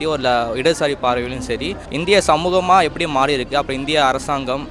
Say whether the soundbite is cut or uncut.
cut